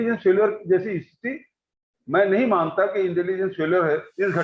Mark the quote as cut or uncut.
uncut